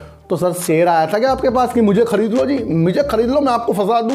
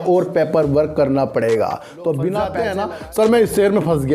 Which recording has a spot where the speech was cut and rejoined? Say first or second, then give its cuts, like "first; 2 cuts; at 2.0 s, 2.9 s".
second; 1 cut; at 2.5 s